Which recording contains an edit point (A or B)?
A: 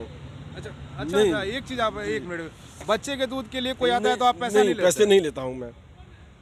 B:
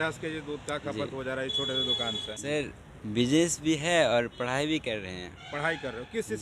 B